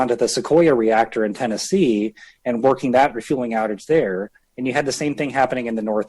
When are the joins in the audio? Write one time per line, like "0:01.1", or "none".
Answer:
none